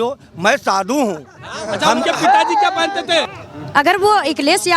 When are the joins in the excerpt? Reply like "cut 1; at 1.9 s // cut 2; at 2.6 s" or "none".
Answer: cut 1; at 3.3 s